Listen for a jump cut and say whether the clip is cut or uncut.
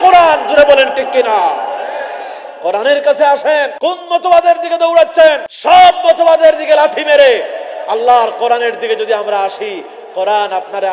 cut